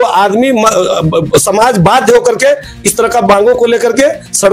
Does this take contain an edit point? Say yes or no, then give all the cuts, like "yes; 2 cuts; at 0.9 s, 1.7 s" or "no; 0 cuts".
no; 0 cuts